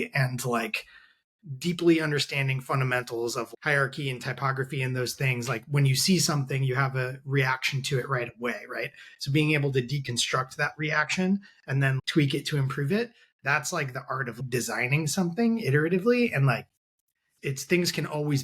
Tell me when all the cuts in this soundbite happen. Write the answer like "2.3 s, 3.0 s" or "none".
17.3 s